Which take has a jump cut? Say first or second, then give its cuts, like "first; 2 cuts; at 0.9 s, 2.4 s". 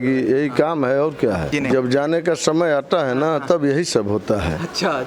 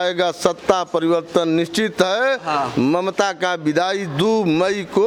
first; 1 cut; at 1.5 s